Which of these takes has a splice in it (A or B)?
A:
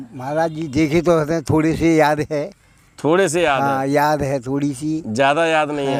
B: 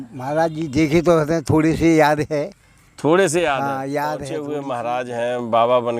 B